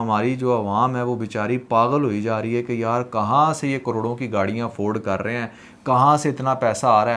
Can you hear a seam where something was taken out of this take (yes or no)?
no